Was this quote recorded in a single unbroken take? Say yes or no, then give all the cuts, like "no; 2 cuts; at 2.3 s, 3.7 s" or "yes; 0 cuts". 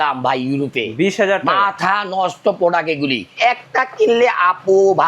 no; 1 cut; at 3.3 s